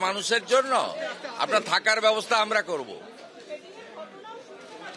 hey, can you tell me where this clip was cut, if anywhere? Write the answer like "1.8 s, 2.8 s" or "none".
none